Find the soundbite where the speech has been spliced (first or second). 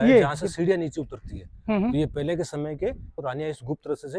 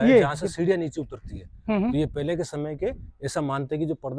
first